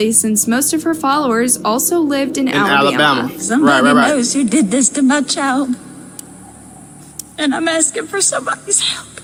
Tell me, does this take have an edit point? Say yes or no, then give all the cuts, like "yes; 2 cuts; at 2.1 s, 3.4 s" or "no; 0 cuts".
no; 0 cuts